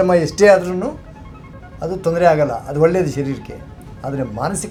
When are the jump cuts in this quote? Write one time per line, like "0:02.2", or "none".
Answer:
none